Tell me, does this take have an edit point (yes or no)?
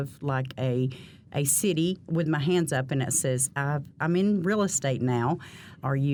no